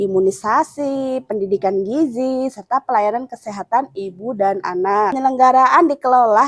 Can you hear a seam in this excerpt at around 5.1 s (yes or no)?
yes